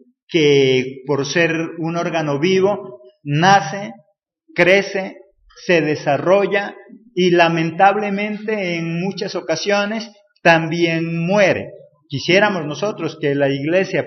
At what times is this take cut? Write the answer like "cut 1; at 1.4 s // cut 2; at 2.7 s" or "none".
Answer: cut 1; at 7.1 s